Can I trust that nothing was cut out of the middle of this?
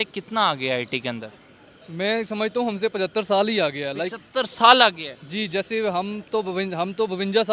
yes; 0 cuts

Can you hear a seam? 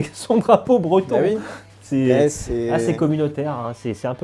no; 0 cuts

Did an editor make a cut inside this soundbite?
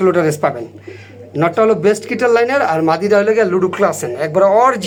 no; 0 cuts

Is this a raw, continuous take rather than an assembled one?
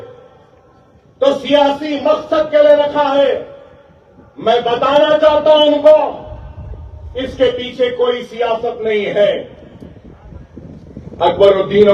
yes; 0 cuts

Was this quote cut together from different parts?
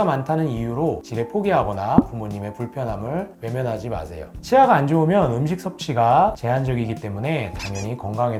no; 0 cuts

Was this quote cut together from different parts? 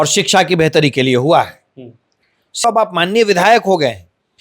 yes; 1 cut; at 2.6 s

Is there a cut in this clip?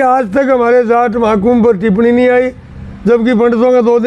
no; 0 cuts

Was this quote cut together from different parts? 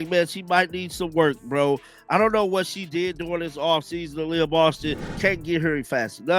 yes; 1 cut; at 5.1 s

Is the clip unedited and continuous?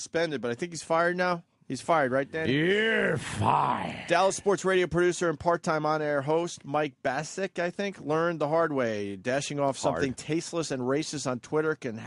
no; 1 cut; at 10.9 s

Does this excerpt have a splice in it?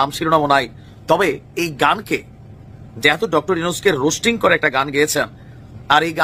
no; 0 cuts

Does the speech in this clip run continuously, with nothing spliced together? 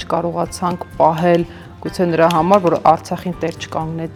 yes; 0 cuts

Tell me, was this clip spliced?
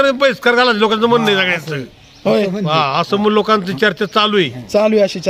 no; 0 cuts

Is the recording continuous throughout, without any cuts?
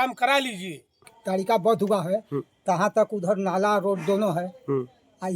no; 1 cut; at 1.1 s

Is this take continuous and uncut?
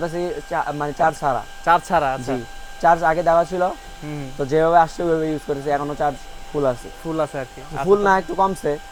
yes; 0 cuts

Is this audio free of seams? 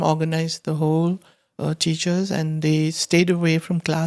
yes; 0 cuts

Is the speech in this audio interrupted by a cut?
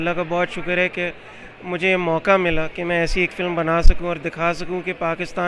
no; 0 cuts

